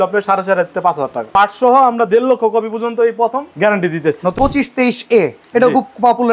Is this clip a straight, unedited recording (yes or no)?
no